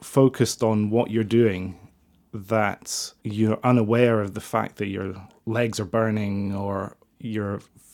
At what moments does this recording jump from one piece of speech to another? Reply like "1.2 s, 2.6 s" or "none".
none